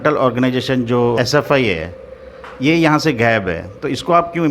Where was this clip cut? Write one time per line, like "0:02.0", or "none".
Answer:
0:01.2